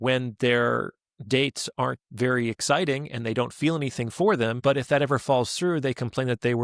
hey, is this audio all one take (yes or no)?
no